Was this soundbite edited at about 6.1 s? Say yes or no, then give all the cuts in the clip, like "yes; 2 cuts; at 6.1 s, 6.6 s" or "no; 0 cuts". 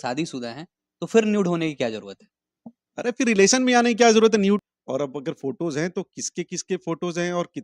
no; 1 cut; at 4.6 s